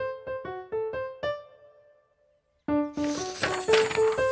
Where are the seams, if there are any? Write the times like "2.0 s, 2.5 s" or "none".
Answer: 1.1 s, 2.6 s